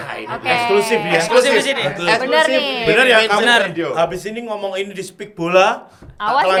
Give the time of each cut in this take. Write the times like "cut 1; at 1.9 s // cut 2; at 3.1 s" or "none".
none